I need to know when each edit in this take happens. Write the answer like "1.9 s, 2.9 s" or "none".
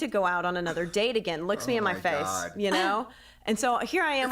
none